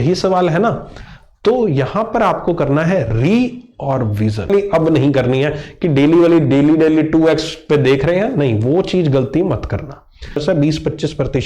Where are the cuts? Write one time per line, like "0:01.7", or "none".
0:04.5
0:10.4